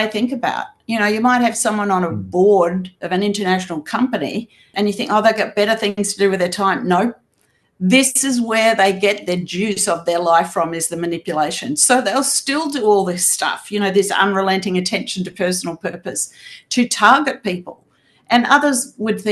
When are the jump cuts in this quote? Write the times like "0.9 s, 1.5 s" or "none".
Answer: 4.7 s

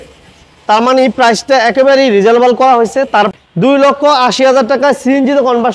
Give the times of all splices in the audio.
3.3 s

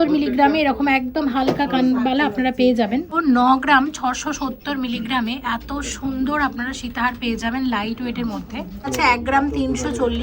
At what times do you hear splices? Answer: 3.2 s, 8.9 s

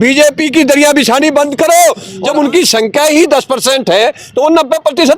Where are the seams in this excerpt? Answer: 2.1 s

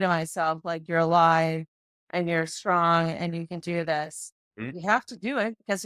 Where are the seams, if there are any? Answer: 4.7 s

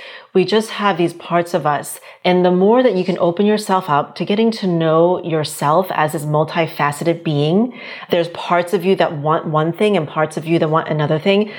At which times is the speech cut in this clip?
2.0 s

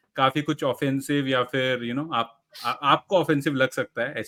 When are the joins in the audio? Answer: none

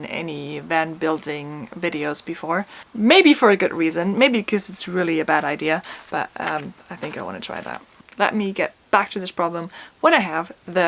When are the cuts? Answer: none

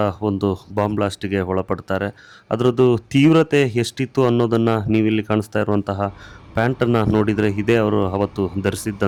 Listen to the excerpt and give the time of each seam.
none

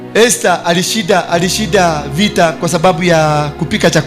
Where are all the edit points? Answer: none

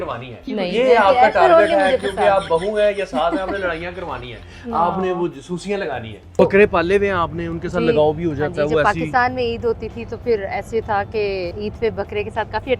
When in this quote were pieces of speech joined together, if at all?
6.4 s, 11.5 s

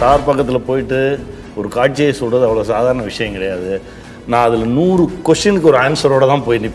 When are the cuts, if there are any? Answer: none

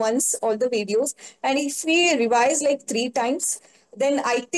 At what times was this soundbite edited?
none

